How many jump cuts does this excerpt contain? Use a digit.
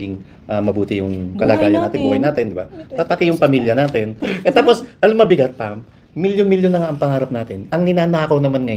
1